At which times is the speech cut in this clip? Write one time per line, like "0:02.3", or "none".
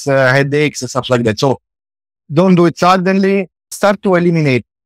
0:03.7